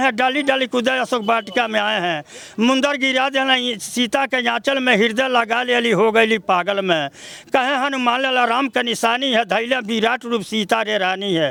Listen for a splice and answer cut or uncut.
uncut